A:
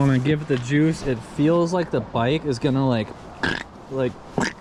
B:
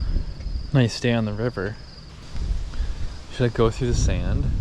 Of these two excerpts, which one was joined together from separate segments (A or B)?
B